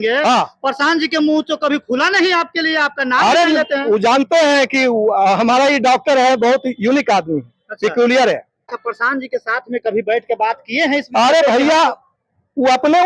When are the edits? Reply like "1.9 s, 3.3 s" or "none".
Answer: 8.7 s